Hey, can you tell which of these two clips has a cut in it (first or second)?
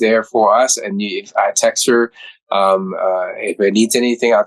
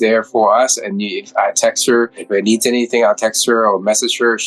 second